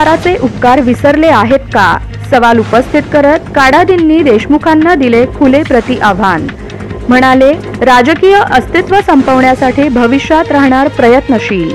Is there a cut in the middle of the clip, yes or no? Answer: no